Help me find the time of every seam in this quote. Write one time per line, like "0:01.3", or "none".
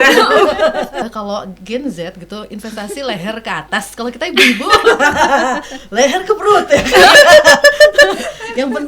0:01.0